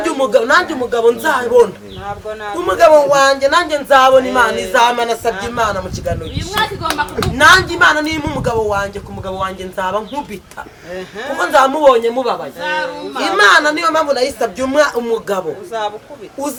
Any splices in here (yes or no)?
no